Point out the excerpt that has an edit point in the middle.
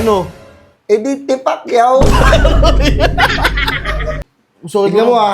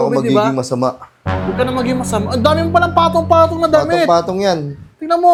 first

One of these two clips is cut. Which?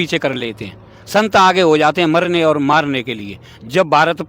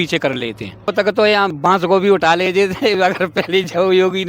second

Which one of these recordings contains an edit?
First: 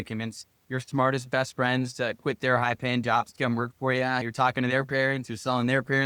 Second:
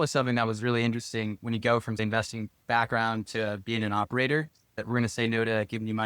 second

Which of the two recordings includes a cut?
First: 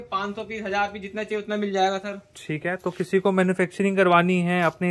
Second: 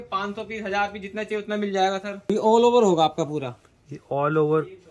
second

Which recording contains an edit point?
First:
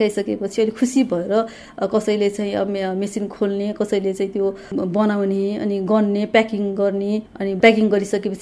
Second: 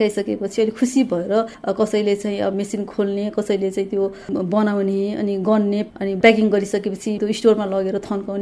second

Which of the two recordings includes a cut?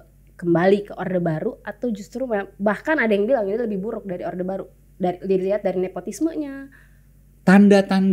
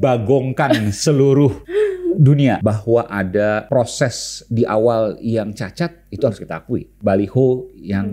second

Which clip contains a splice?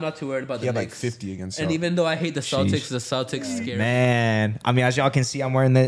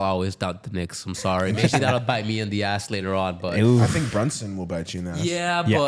first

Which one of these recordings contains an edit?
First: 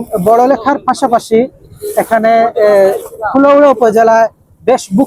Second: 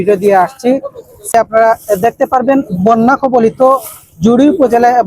second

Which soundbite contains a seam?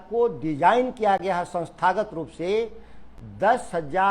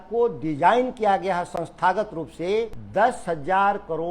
second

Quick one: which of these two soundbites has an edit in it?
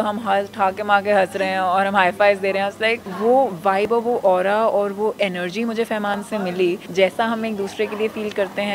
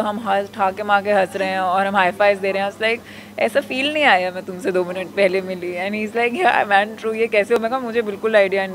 first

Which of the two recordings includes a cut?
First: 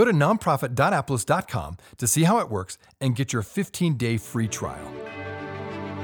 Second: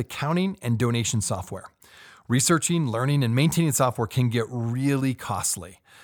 first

